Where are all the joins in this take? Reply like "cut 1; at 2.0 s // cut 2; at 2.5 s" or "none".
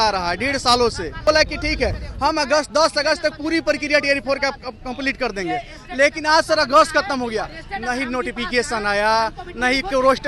cut 1; at 1.2 s